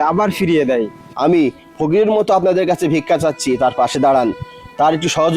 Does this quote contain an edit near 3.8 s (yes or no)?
no